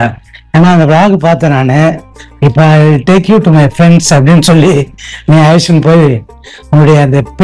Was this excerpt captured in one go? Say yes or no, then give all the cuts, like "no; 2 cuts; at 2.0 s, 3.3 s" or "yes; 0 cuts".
yes; 0 cuts